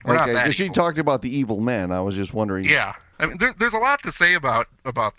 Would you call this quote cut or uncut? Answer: cut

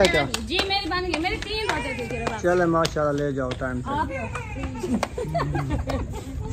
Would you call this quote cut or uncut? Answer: cut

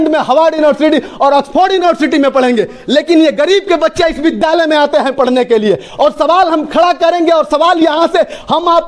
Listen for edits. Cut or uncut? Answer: uncut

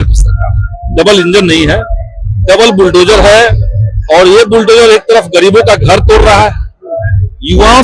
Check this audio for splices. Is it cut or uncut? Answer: uncut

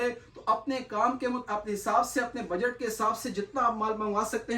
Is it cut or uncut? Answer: uncut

